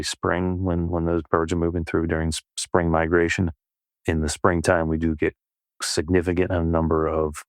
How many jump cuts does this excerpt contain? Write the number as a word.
zero